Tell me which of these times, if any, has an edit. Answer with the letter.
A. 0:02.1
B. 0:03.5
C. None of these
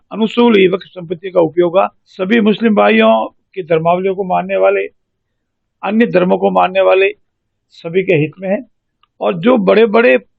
A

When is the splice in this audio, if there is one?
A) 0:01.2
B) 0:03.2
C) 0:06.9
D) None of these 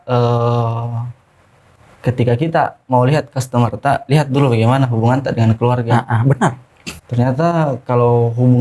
C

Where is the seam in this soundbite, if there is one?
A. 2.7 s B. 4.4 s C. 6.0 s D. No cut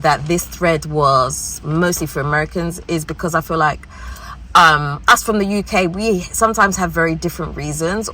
D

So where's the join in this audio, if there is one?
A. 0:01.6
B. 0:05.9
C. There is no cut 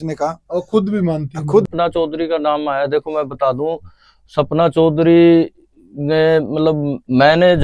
A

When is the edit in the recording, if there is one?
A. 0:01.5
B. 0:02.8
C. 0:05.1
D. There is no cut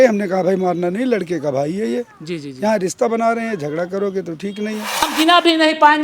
C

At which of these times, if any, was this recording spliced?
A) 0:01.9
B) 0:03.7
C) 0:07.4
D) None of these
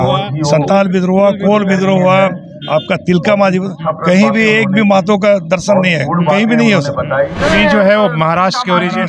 C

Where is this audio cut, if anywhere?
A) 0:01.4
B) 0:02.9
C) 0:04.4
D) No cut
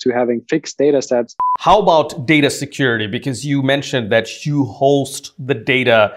A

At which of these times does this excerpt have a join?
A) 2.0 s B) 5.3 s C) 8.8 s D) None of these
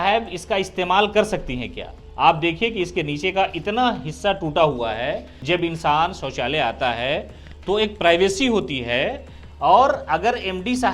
B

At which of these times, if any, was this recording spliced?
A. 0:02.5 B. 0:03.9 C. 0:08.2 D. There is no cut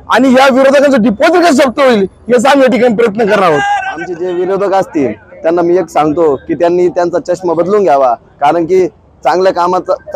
B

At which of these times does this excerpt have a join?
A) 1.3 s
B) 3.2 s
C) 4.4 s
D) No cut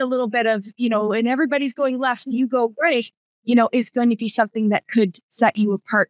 D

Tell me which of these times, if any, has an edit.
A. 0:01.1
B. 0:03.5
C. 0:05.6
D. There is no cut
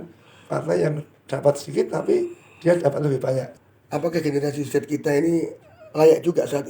B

